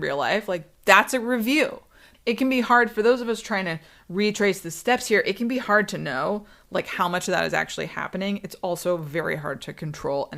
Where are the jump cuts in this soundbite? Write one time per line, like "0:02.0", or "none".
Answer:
0:02.0